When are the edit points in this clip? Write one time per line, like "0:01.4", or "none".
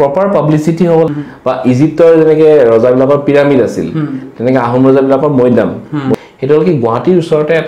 0:01.1
0:06.1